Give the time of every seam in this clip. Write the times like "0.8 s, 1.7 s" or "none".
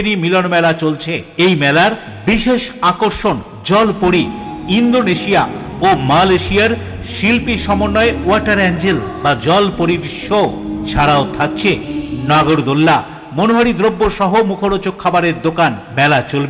none